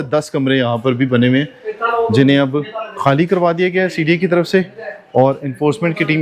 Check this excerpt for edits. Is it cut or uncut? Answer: uncut